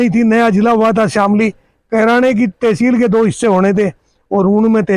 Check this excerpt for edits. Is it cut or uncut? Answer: uncut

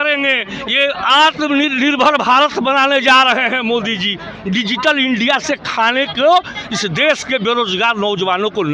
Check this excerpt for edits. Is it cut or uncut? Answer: uncut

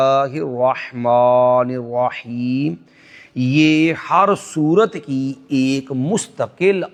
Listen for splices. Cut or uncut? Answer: uncut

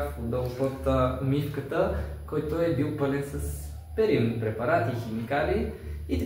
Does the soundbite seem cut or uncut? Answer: uncut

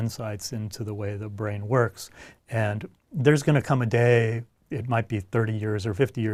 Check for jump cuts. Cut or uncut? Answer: uncut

